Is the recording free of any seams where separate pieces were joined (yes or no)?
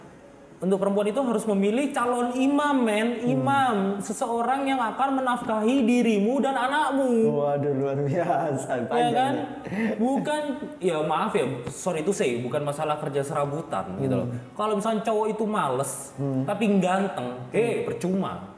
yes